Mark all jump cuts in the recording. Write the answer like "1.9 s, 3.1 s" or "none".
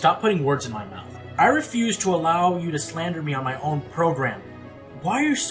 1.5 s